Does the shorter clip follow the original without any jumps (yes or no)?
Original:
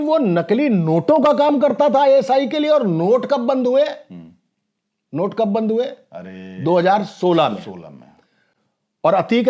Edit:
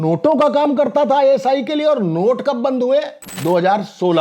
no